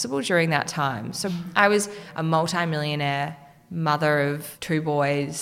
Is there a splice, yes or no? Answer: yes